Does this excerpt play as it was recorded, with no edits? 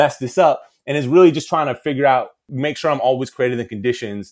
no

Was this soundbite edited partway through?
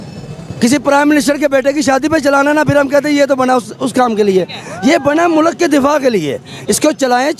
no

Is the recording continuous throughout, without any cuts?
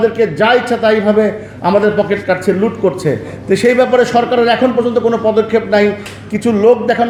yes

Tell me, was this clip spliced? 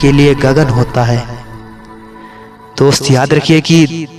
no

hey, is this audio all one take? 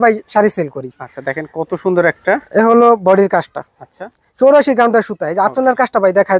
yes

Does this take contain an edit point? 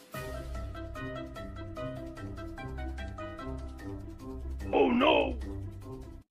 yes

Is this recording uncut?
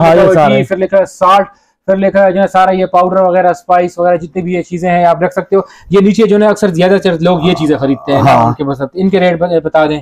yes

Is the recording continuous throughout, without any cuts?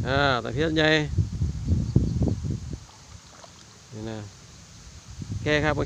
yes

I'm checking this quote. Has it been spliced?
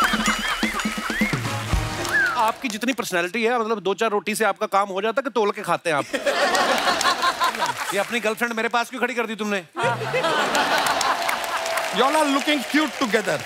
yes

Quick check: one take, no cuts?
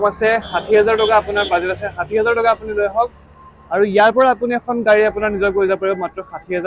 yes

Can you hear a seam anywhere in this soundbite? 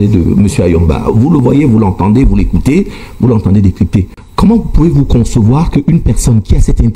no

